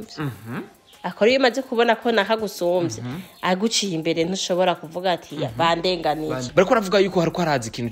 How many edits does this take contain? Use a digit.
1